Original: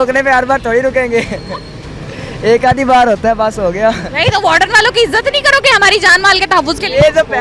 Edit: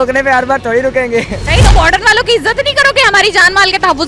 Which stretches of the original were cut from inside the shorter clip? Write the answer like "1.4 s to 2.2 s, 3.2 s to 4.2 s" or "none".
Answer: 1.4 s to 4.1 s

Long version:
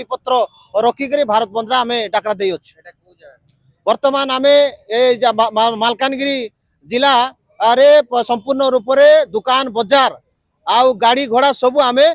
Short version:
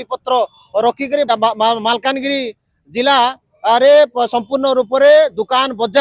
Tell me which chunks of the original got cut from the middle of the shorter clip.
1.3 s to 5.2 s

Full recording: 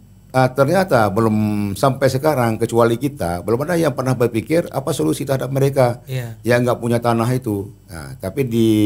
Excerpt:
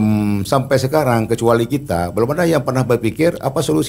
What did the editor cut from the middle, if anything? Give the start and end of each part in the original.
none

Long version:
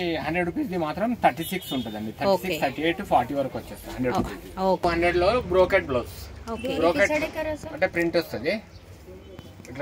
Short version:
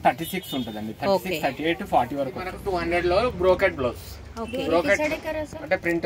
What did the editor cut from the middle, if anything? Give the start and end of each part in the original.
3.9 s to 4.8 s

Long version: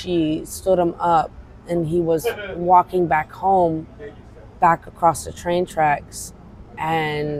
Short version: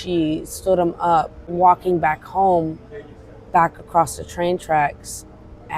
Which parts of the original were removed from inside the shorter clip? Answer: 1.4 s to 2.5 s

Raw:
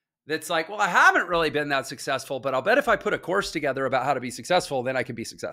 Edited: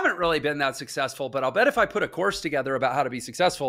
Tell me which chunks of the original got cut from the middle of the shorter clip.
none

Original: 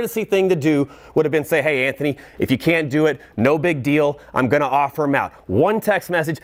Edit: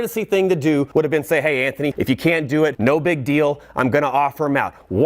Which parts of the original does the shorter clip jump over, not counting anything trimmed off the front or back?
0.9 s to 1.1 s, 2.2 s to 2.4 s, 3.2 s to 3.3 s

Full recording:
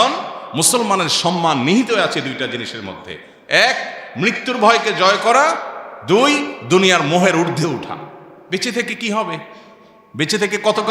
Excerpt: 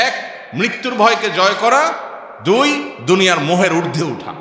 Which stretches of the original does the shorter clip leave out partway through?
none

